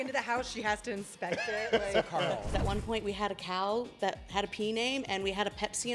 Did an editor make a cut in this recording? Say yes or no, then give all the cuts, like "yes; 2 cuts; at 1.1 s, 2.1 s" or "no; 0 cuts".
yes; 1 cut; at 2.5 s